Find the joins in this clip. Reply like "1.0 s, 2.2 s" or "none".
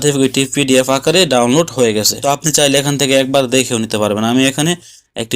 2.2 s